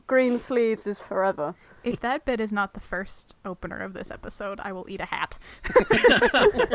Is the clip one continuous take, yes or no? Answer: no